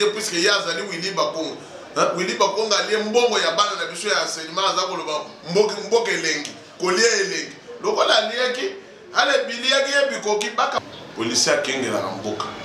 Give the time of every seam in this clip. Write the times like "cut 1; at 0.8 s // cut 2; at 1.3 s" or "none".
cut 1; at 10.8 s